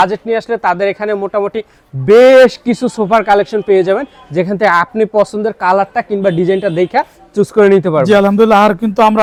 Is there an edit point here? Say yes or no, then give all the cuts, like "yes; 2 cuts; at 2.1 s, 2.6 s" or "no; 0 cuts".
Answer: no; 0 cuts